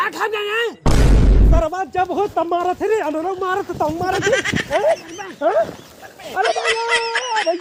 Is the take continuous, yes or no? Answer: yes